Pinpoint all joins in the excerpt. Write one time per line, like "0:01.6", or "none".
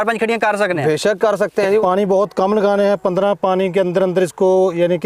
0:01.8